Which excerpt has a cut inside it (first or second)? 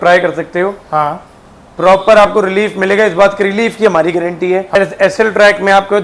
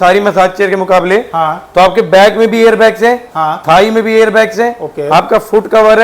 first